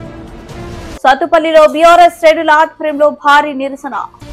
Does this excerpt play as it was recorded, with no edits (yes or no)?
no